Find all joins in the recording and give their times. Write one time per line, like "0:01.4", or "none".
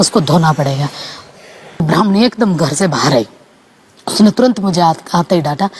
0:01.8